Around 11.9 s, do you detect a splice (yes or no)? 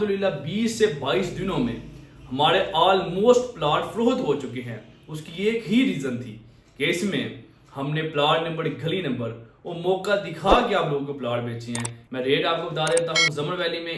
yes